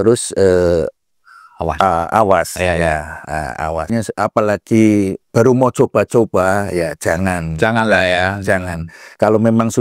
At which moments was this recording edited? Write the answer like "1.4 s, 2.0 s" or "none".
3.9 s